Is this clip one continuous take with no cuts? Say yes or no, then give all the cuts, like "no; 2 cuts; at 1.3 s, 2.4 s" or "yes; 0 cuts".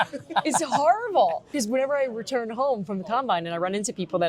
no; 1 cut; at 1.5 s